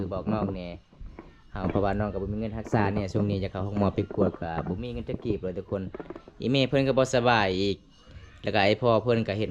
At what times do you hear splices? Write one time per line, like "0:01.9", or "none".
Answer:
none